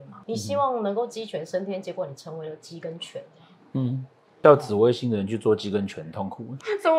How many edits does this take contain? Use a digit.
0